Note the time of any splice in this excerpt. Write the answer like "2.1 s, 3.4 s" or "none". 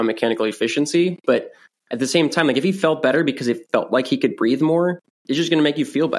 5.1 s